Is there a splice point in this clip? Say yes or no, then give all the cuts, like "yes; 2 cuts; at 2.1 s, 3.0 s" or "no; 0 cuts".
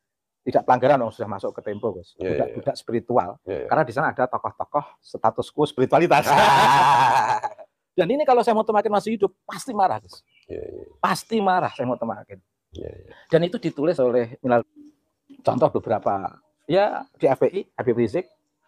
yes; 1 cut; at 14.7 s